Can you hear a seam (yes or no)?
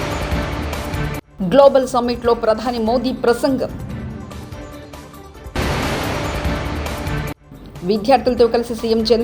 yes